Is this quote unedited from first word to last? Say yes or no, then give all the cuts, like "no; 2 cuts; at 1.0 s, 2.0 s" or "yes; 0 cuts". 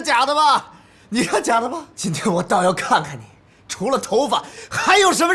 no; 1 cut; at 1.9 s